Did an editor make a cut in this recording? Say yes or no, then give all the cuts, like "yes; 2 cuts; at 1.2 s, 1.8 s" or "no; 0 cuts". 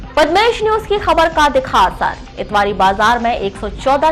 no; 0 cuts